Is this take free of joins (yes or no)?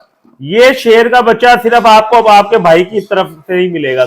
yes